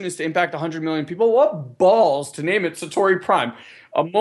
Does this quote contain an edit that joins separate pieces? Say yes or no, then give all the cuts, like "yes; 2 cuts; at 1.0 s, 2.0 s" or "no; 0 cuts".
no; 0 cuts